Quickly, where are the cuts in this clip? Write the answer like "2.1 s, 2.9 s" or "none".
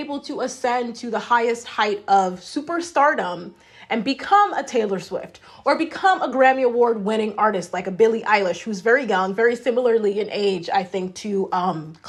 none